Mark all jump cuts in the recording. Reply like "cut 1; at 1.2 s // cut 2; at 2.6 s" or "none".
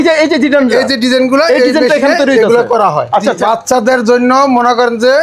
cut 1; at 3.4 s